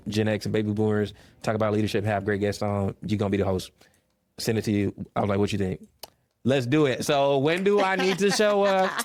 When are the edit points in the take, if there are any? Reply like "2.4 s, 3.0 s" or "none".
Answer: none